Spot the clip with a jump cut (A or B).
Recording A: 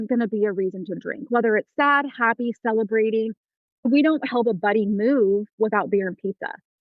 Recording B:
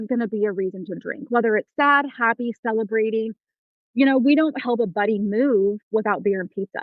A